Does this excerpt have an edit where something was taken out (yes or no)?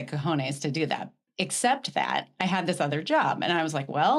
no